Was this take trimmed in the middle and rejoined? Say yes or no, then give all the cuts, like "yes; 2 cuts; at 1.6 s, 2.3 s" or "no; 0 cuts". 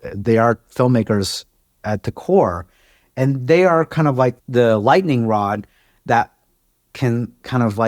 yes; 1 cut; at 4.4 s